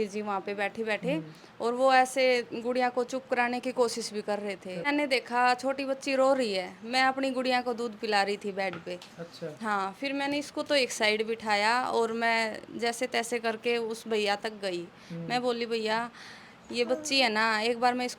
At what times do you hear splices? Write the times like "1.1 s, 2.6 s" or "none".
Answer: 4.8 s